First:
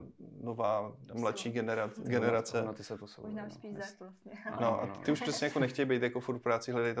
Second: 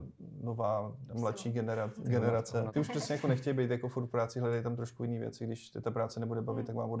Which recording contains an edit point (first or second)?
second